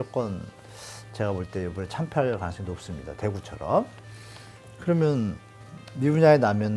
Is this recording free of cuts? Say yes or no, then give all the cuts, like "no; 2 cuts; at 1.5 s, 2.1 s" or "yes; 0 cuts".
yes; 0 cuts